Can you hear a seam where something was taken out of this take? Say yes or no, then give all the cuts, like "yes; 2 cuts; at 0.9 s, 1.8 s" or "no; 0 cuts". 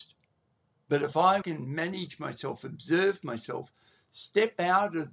yes; 1 cut; at 1.4 s